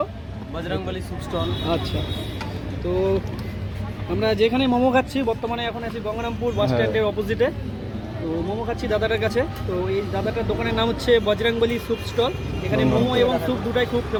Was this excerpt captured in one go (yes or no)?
yes